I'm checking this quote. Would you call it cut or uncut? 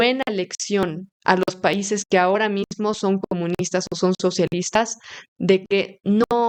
uncut